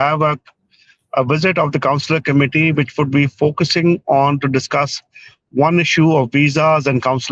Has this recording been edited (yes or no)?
no